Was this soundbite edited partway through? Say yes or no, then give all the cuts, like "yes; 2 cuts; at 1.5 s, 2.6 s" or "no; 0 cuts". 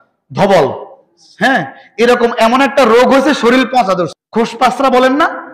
yes; 1 cut; at 4.2 s